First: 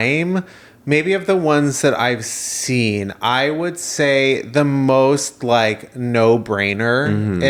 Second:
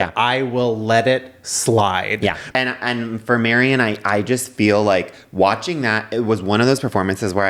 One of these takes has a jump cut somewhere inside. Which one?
second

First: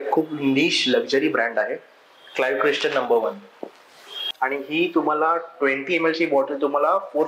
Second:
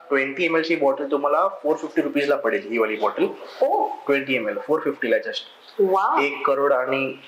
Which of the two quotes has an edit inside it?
first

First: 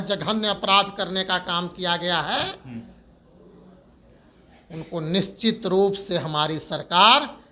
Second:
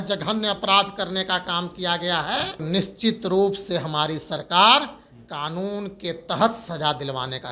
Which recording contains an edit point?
second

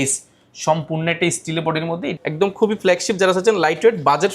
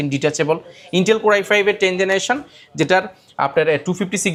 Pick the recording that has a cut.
first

